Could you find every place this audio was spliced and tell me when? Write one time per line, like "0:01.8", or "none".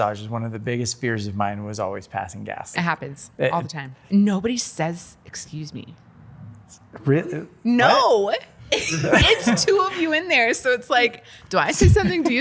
0:02.8
0:04.0
0:08.5